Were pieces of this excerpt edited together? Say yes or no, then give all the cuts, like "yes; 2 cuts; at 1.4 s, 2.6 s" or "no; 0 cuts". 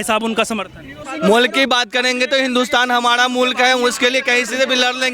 yes; 1 cut; at 1.0 s